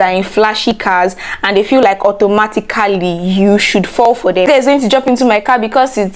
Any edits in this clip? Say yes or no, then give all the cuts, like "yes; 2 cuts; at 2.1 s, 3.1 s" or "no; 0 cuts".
yes; 1 cut; at 4.5 s